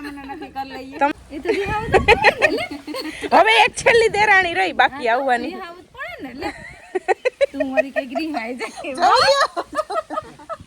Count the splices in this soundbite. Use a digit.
1